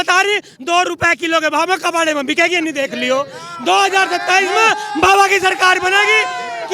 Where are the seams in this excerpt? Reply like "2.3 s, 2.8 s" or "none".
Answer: none